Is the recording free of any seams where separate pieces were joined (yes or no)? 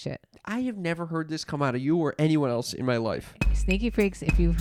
yes